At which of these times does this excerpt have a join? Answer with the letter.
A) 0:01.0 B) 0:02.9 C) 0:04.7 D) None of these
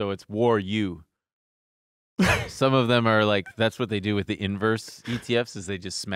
D